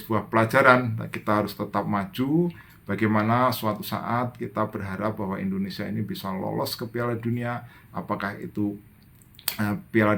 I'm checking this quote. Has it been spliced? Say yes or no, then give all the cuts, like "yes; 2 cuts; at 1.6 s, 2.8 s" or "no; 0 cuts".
no; 0 cuts